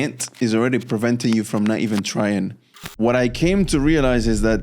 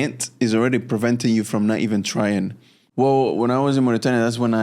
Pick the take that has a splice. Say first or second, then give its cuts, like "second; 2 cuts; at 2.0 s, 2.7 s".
first; 1 cut; at 2.9 s